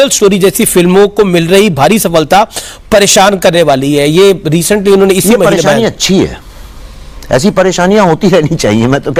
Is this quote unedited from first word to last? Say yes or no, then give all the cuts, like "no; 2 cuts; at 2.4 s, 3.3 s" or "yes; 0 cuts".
yes; 0 cuts